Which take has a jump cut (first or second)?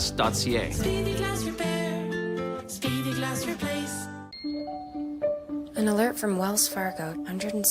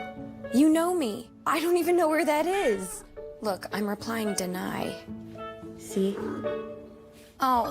first